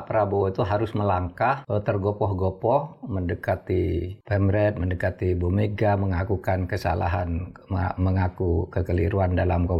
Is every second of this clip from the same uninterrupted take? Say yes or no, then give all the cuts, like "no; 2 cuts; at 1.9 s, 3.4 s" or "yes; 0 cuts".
no; 2 cuts; at 1.6 s, 4.2 s